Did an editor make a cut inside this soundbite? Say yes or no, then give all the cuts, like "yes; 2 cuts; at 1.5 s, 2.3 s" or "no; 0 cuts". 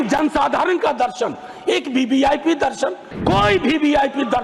yes; 1 cut; at 3.1 s